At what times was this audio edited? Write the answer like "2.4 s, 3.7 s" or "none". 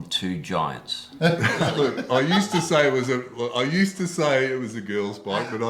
1.7 s